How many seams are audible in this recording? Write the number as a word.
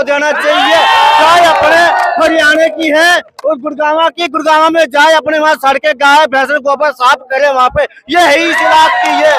zero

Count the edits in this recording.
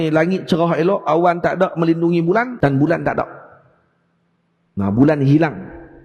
one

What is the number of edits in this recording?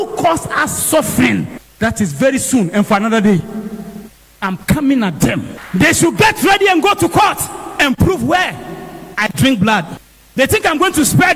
zero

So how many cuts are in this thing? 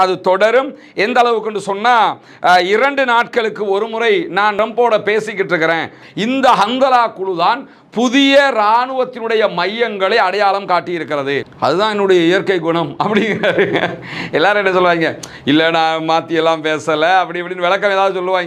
two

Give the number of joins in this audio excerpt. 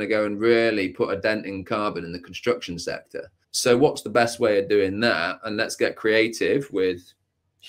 one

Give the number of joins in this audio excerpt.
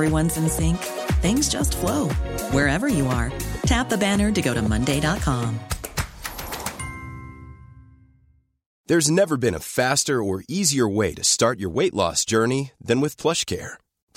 one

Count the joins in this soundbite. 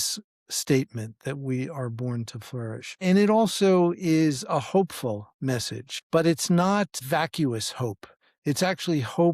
two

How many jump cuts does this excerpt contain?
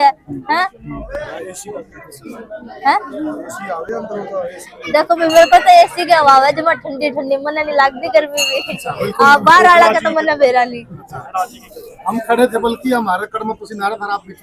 zero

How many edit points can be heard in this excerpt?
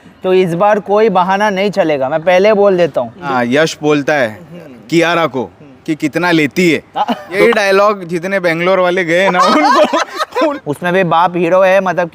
three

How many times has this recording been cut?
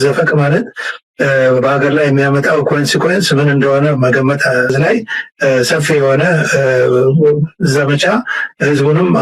one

